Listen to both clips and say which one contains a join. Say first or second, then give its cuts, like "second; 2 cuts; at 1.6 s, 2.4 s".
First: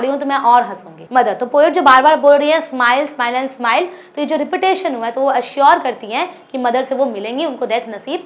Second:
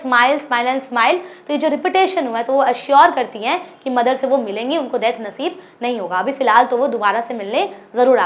first; 1 cut; at 1.0 s